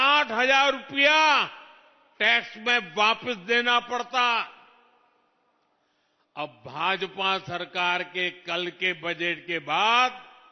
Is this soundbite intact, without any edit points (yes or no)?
yes